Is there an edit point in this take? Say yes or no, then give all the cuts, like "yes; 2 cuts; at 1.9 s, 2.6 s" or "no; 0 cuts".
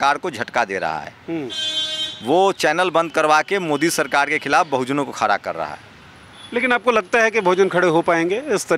no; 0 cuts